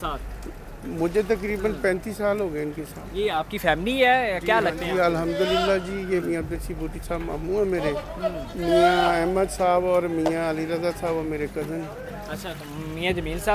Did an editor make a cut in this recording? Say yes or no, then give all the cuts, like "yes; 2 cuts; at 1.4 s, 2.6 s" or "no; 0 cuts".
no; 0 cuts